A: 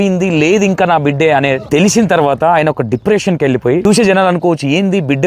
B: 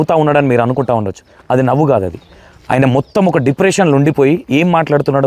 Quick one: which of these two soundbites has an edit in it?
A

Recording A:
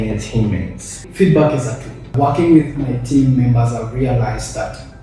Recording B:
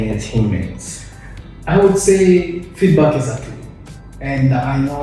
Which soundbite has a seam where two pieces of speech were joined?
A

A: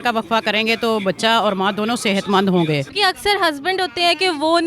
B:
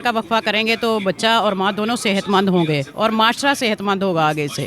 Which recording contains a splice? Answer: A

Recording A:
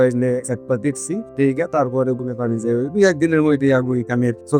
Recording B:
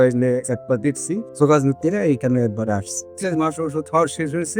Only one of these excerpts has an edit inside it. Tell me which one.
B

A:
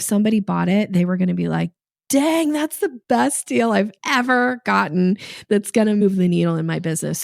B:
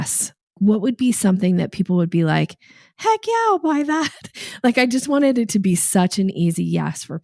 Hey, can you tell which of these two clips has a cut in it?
A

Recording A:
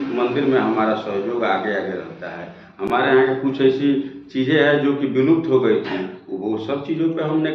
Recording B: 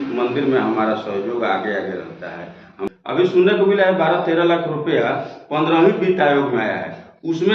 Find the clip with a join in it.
B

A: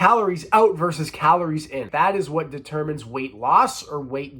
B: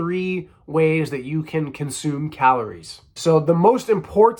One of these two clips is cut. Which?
A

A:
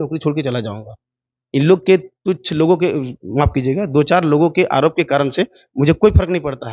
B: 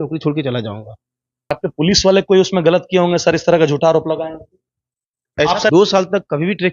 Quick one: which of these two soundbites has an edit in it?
B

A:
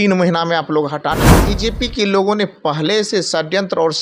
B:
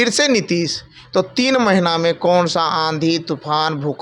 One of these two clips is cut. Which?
A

